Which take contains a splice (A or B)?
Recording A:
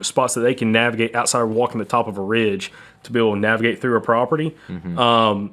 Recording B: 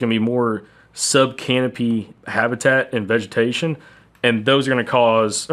B